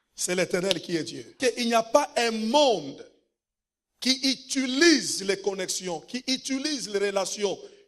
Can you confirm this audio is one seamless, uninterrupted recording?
no; 1 cut; at 1.4 s

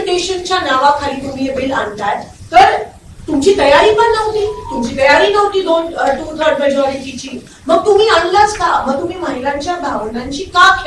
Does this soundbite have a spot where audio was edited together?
no; 0 cuts

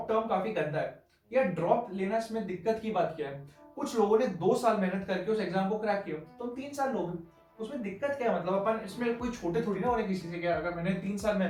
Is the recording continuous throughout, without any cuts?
yes; 0 cuts

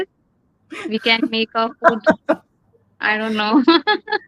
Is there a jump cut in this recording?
no; 0 cuts

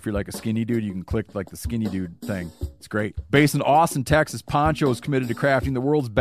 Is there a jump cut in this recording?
no; 0 cuts

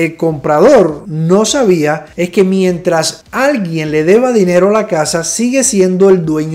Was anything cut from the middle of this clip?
no; 0 cuts

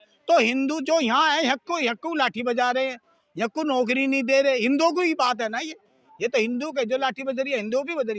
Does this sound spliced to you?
no; 0 cuts

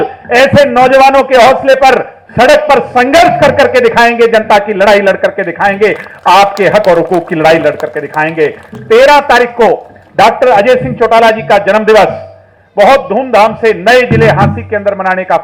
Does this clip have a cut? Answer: no; 0 cuts

